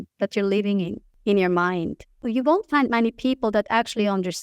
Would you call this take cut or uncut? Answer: cut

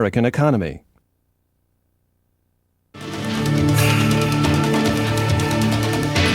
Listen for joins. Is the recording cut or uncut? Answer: uncut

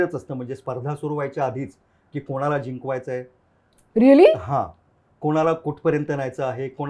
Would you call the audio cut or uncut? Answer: uncut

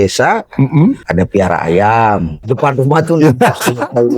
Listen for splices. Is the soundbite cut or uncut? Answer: cut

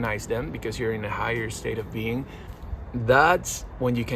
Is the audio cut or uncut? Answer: cut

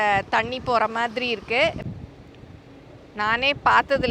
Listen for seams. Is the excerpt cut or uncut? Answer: cut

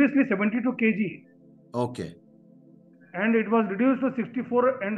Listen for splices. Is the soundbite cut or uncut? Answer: uncut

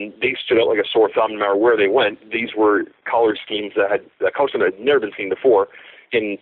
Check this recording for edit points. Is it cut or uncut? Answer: uncut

